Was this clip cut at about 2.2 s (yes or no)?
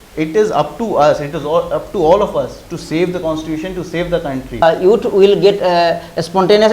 no